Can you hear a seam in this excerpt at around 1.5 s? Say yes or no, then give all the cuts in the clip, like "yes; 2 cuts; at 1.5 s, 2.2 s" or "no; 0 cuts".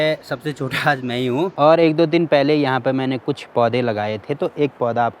yes; 1 cut; at 1.5 s